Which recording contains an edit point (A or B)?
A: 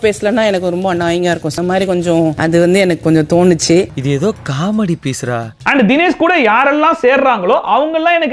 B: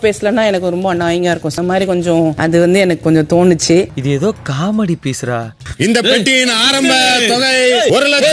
B